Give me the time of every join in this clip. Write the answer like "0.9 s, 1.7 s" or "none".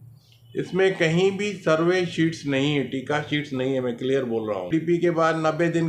4.7 s